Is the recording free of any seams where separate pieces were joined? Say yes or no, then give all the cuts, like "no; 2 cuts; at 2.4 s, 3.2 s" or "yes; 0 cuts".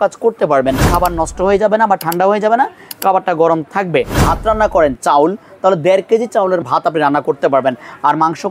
no; 3 cuts; at 0.9 s, 4.1 s, 6.6 s